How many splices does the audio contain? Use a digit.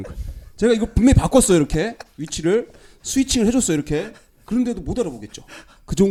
0